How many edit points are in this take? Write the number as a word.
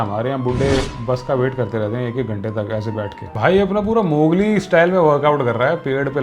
one